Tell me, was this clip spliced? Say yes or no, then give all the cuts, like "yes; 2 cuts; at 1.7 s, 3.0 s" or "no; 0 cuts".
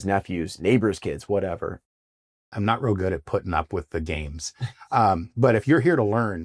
yes; 1 cut; at 1.9 s